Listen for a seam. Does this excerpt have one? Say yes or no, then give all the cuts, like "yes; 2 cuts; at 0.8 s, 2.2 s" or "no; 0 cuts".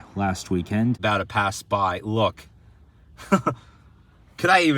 yes; 1 cut; at 1.0 s